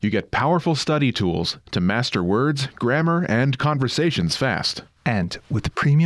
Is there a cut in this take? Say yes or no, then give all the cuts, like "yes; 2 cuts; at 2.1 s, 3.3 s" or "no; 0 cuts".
no; 0 cuts